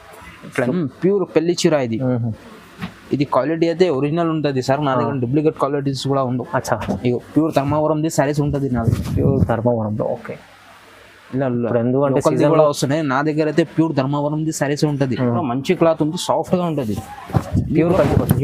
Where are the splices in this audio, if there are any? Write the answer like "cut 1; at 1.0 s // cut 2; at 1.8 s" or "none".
cut 1; at 0.7 s // cut 2; at 15.4 s